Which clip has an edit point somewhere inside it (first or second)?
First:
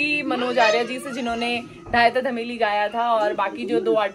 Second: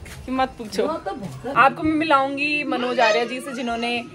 second